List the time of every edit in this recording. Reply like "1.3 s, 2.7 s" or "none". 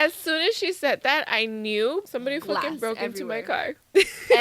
2.1 s